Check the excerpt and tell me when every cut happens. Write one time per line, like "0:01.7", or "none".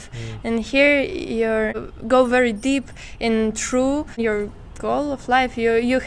0:01.9
0:04.2